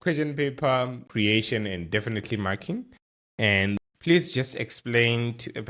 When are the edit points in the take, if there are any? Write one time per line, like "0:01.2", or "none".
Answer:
0:01.1
0:03.8